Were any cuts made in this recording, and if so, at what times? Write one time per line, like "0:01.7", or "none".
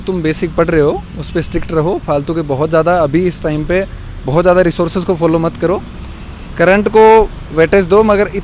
none